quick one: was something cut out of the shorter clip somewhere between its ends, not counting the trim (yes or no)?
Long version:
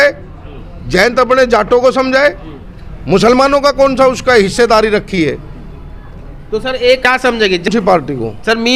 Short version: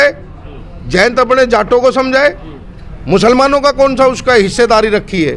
no